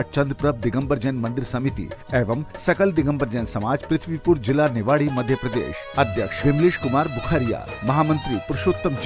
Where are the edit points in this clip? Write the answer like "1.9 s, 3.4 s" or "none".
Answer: none